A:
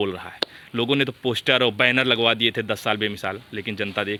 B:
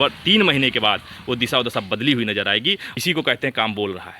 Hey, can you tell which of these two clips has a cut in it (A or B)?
B